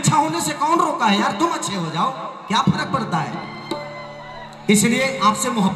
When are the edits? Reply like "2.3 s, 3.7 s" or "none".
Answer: none